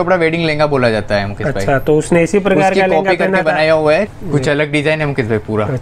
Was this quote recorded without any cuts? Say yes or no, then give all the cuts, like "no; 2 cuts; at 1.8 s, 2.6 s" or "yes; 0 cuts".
no; 1 cut; at 4.1 s